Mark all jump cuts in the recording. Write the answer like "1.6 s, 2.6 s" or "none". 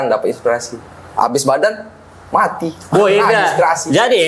none